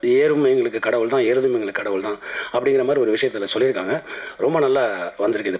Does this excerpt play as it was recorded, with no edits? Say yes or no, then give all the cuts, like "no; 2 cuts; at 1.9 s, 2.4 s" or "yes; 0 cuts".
yes; 0 cuts